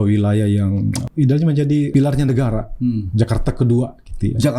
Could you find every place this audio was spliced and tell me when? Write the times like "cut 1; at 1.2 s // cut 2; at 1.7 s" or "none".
cut 1; at 1.0 s // cut 2; at 1.9 s